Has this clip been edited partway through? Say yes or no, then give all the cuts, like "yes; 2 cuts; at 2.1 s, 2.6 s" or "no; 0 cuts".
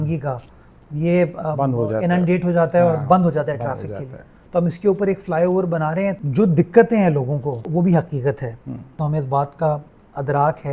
yes; 3 cuts; at 6.2 s, 7.7 s, 8.9 s